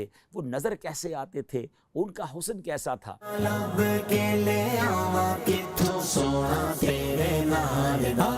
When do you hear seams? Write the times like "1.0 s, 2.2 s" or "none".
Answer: 3.3 s